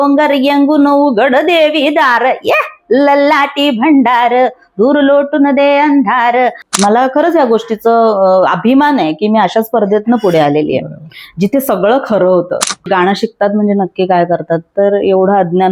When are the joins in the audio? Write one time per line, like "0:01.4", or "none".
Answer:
0:06.6
0:12.9

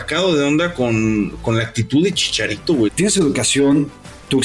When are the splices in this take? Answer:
0:02.9

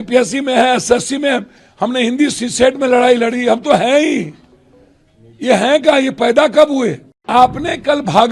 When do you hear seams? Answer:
0:07.3

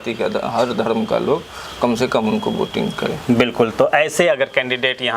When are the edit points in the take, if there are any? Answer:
none

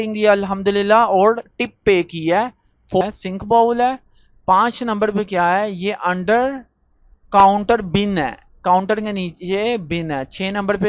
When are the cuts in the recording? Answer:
0:03.0

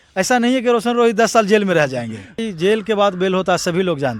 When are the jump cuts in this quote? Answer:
0:02.4

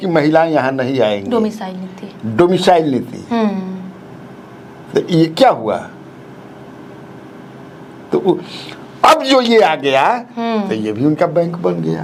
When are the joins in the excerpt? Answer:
none

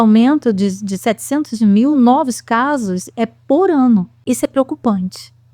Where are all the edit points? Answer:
0:04.1

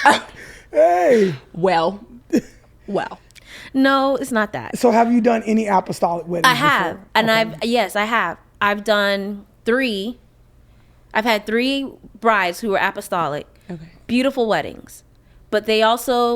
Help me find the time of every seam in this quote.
none

